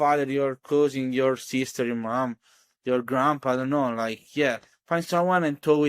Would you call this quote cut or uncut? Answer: uncut